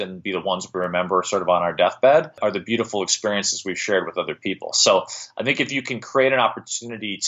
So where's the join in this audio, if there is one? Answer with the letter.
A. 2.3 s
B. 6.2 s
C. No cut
A